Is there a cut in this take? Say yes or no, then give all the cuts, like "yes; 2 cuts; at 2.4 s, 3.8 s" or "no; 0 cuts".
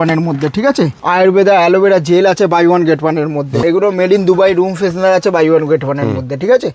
yes; 2 cuts; at 0.9 s, 3.6 s